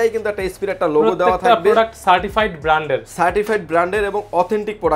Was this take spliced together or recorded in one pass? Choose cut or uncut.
uncut